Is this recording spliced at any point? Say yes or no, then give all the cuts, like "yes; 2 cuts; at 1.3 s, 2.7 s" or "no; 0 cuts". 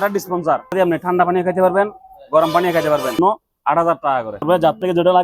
yes; 3 cuts; at 0.7 s, 3.2 s, 4.4 s